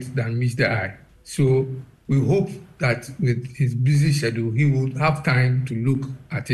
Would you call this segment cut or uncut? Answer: uncut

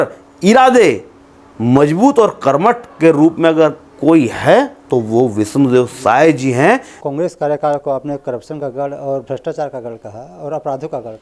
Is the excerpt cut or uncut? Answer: cut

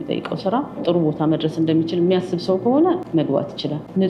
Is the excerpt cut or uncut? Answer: cut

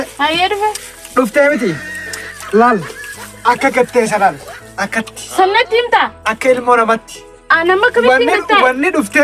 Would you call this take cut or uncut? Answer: uncut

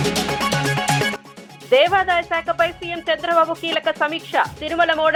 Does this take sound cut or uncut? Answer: uncut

